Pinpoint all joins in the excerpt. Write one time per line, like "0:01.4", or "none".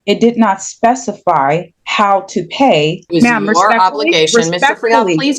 0:01.8
0:03.1